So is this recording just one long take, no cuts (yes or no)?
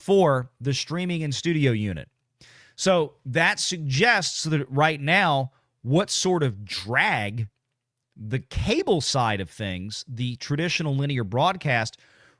yes